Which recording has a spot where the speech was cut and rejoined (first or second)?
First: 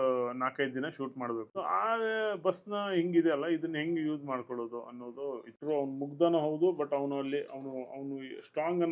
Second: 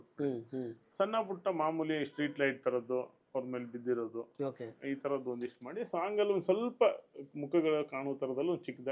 first